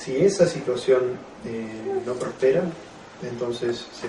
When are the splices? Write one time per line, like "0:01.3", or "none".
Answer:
0:01.4